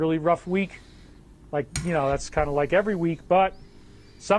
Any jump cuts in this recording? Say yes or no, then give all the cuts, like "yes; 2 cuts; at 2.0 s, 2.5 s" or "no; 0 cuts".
no; 0 cuts